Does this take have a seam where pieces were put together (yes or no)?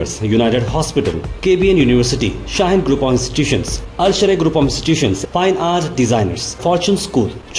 no